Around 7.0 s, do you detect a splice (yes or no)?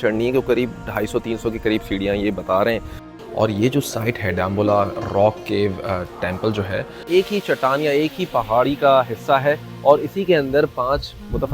yes